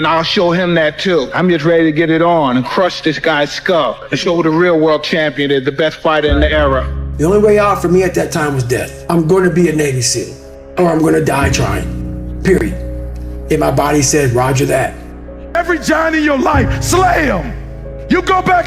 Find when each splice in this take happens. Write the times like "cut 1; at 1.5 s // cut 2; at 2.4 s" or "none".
cut 1; at 8.9 s